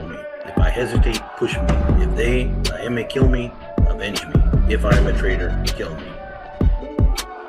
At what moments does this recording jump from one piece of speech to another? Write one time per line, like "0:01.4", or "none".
0:06.2